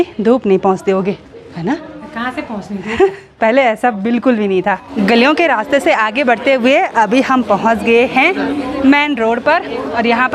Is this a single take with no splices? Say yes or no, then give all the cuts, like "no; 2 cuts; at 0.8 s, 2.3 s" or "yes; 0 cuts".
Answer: yes; 0 cuts